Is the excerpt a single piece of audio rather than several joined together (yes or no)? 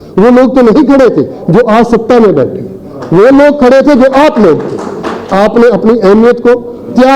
no